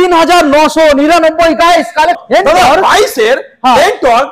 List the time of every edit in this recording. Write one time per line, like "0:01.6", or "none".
0:02.2